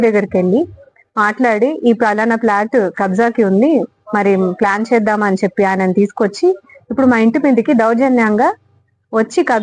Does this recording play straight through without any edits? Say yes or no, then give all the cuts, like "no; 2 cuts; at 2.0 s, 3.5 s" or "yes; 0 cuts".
yes; 0 cuts